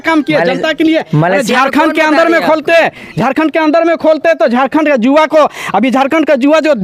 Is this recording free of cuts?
yes; 0 cuts

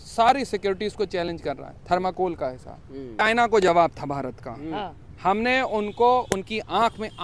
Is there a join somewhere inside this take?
yes; 1 cut; at 3.2 s

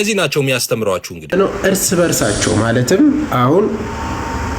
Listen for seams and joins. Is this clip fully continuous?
no; 1 cut; at 1.3 s

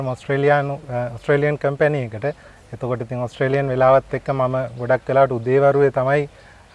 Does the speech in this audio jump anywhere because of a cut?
no; 0 cuts

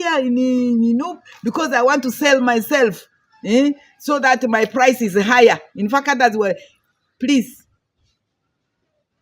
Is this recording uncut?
yes; 0 cuts

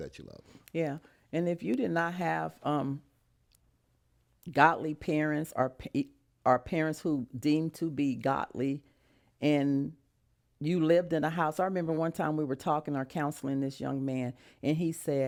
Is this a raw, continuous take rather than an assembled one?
yes; 0 cuts

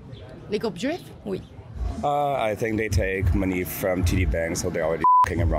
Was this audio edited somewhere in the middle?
yes; 1 cut; at 1.8 s

